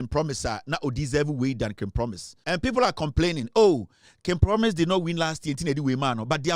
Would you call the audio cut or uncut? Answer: cut